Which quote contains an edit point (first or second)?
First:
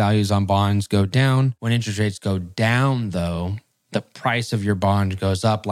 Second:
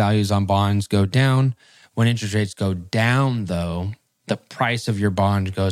first